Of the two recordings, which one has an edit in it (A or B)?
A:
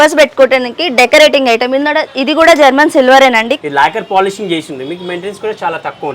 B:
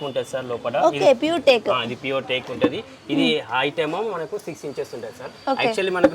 A